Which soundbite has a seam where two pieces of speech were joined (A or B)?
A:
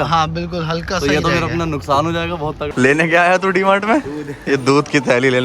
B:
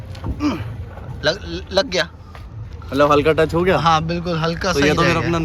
A